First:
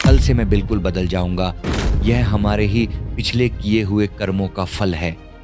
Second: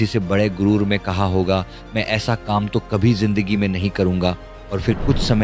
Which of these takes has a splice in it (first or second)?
first